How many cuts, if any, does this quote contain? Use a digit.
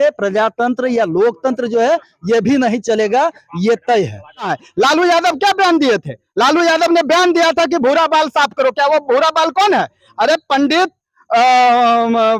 1